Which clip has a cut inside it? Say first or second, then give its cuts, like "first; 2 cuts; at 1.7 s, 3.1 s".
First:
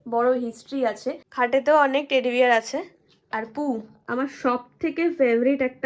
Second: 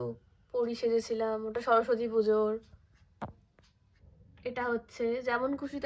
first; 1 cut; at 1.2 s